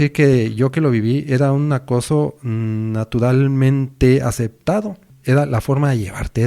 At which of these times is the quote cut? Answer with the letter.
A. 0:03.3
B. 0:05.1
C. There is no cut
B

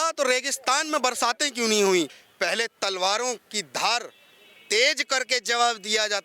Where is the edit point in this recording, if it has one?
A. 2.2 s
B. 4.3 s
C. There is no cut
A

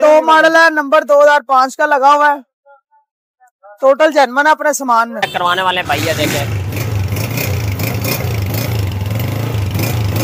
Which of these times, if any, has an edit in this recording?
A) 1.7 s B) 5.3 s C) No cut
B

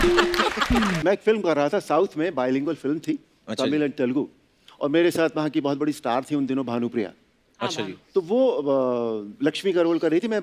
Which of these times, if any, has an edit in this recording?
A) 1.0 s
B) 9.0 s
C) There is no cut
A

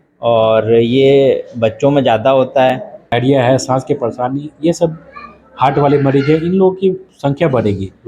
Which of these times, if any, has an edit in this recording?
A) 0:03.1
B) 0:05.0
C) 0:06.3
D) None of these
A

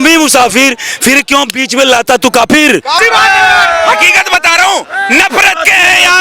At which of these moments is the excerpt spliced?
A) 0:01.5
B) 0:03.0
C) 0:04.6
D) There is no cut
B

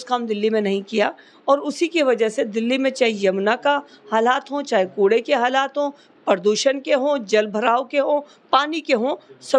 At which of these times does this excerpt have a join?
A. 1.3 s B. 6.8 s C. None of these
C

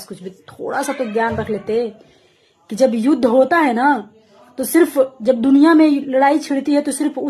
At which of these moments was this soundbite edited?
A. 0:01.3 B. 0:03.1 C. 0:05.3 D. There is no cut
D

